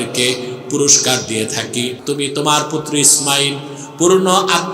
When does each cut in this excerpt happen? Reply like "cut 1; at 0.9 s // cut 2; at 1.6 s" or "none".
cut 1; at 2.0 s